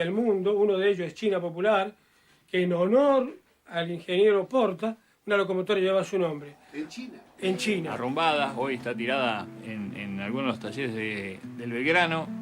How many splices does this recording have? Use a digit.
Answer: 1